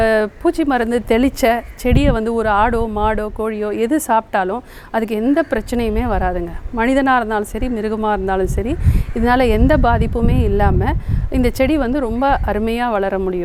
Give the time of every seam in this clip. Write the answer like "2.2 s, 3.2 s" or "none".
none